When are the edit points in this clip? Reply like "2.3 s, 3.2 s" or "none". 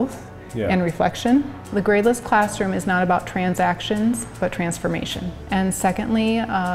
1.6 s, 5.4 s